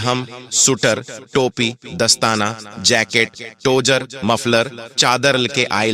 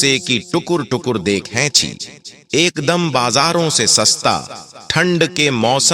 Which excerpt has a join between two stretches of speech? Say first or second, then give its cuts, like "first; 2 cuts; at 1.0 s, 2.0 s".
second; 1 cut; at 2.3 s